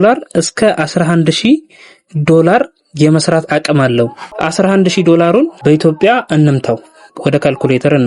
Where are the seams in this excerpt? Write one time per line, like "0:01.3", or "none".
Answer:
0:04.3
0:05.6